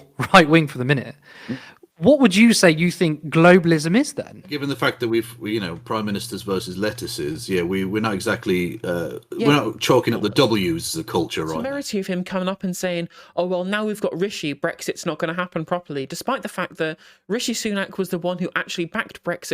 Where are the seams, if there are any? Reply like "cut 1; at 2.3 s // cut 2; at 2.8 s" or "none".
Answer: cut 1; at 4.5 s // cut 2; at 11.6 s